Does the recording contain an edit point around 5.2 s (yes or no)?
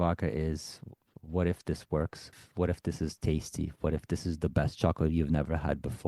no